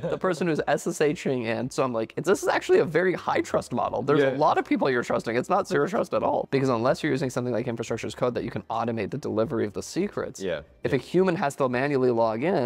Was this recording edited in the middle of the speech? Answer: yes; 2 cuts; at 1.7 s, 6.5 s

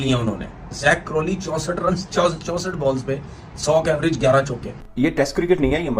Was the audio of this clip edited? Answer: yes; 1 cut; at 4.8 s

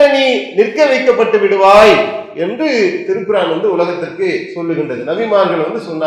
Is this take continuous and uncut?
yes; 0 cuts

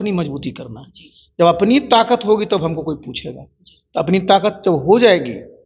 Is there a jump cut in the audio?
no; 0 cuts

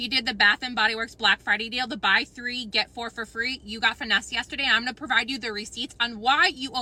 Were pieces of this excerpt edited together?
no; 0 cuts

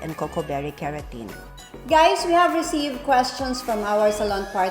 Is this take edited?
yes; 1 cut; at 1.5 s

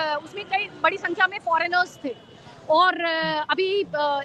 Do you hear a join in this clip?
no; 0 cuts

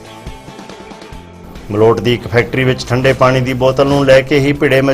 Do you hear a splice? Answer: no; 0 cuts

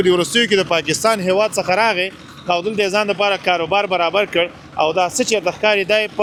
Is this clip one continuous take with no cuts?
yes; 0 cuts

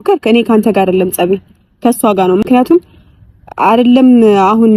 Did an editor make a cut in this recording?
no; 0 cuts

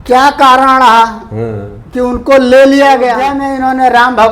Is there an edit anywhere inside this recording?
yes; 1 cut; at 3.4 s

